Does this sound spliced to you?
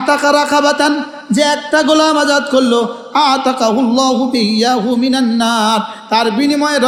no; 0 cuts

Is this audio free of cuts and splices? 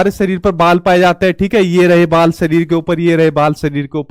yes; 0 cuts

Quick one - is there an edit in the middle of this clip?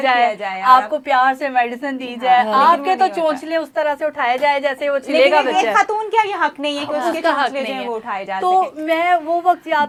no; 0 cuts

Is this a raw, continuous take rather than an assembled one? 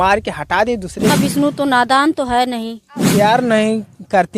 no; 2 cuts; at 1.1 s, 3.1 s

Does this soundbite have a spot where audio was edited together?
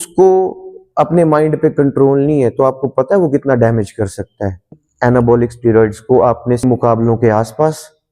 yes; 2 cuts; at 4.7 s, 6.6 s

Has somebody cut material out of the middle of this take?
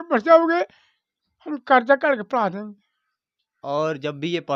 yes; 1 cut; at 3.6 s

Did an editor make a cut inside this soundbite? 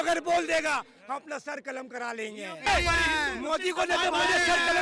yes; 1 cut; at 2.7 s

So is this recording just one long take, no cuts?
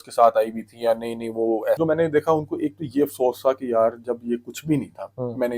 no; 1 cut; at 1.8 s

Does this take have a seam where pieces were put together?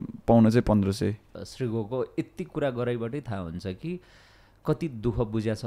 yes; 1 cut; at 1.3 s

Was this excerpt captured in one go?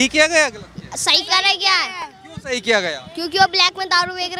yes; 0 cuts

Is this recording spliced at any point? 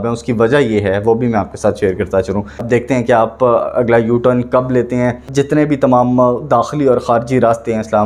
yes; 2 cuts; at 2.6 s, 5.3 s

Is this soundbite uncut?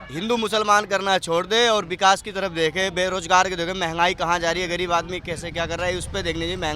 yes; 0 cuts

